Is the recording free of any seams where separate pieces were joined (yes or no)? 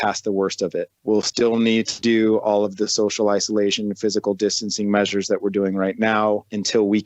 yes